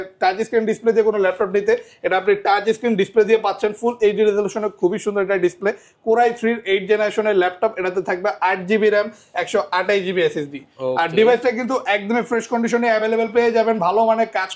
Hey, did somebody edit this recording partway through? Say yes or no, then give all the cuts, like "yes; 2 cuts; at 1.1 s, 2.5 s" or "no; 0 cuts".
no; 0 cuts